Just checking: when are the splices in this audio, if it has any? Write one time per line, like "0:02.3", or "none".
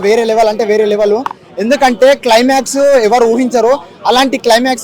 none